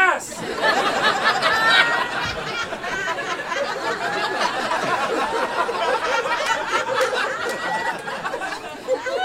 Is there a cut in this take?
no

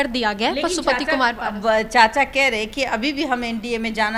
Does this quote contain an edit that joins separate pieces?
no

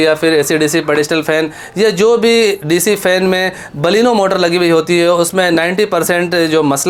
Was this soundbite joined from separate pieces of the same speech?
no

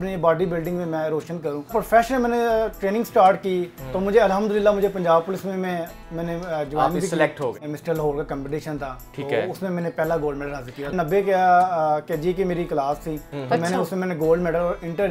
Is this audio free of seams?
no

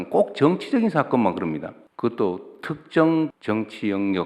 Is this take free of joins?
no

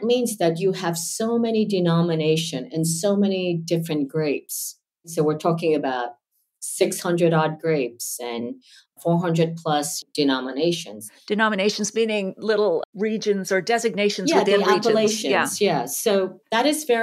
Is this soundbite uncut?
no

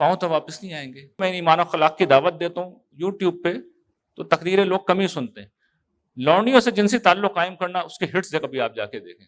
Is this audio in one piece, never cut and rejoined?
no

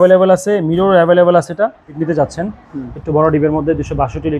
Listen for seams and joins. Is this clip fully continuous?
no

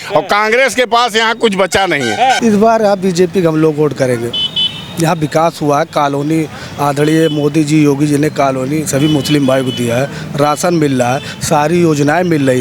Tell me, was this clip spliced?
yes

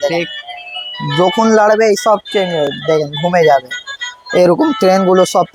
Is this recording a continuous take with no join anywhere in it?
yes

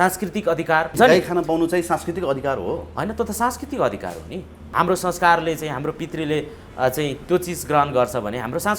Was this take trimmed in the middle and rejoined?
yes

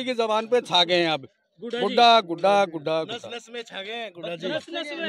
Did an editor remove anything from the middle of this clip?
no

